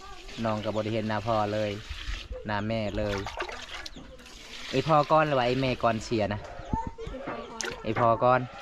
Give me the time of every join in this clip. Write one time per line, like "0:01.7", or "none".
none